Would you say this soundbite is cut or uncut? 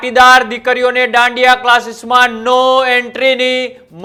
uncut